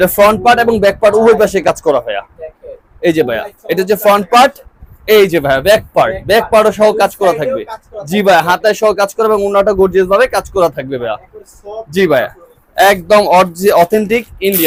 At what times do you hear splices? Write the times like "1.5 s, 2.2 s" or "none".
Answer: none